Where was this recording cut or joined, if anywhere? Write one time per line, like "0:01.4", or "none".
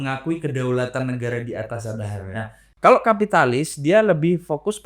0:02.7